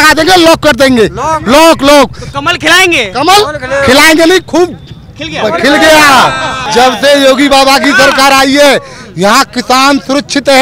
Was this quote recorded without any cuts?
no; 1 cut; at 6.5 s

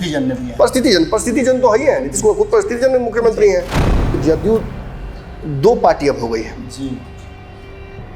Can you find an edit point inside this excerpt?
yes; 1 cut; at 4.2 s

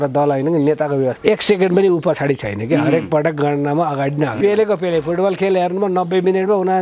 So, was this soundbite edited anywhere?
yes; 2 cuts; at 1.2 s, 4.4 s

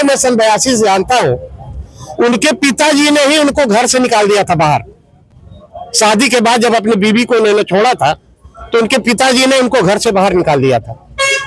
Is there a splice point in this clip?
no; 0 cuts

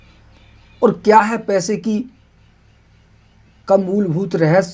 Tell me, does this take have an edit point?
no; 0 cuts

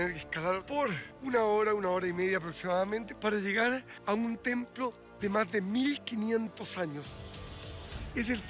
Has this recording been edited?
yes; 4 cuts; at 1.1 s, 3.1 s, 3.9 s, 7.5 s

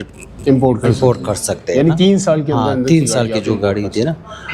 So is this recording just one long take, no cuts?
yes; 0 cuts

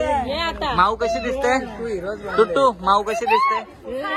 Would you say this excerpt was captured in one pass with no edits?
yes; 0 cuts

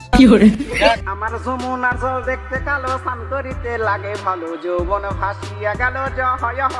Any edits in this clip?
yes; 1 cut; at 1.0 s

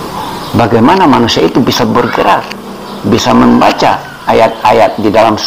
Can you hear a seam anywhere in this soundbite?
no; 0 cuts

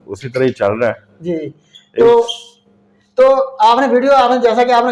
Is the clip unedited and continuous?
yes; 0 cuts

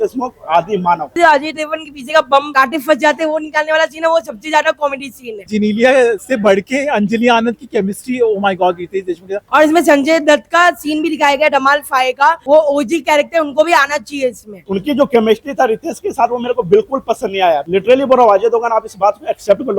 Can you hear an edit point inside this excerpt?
yes; 5 cuts; at 1.2 s, 5.5 s, 9.4 s, 14.6 s, 17.6 s

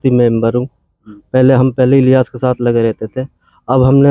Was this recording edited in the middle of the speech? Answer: no; 0 cuts

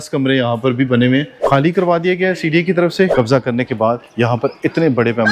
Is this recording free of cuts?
no; 2 cuts; at 1.4 s, 3.1 s

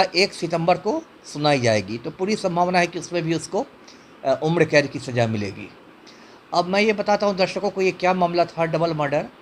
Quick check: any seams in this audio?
no; 0 cuts

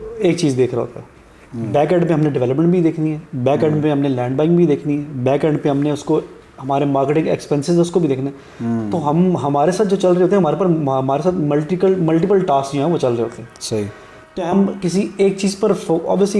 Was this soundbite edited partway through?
no; 0 cuts

